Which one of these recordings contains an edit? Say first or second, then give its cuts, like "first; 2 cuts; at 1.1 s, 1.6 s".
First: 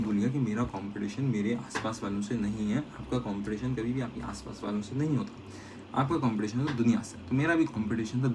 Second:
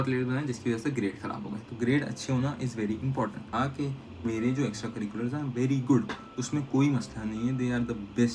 second; 1 cut; at 3.5 s